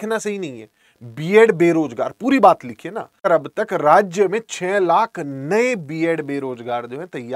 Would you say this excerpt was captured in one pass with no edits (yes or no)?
no